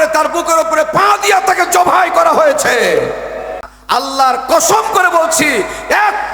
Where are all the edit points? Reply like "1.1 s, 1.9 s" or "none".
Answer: 3.7 s